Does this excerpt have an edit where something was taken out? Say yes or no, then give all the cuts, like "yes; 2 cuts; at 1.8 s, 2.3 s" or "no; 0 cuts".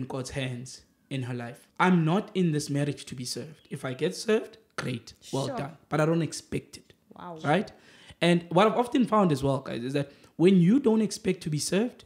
yes; 1 cut; at 1.6 s